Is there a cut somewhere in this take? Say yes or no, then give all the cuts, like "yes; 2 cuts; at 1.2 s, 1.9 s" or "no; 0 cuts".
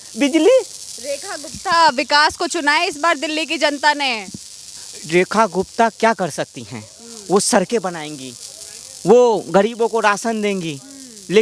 no; 0 cuts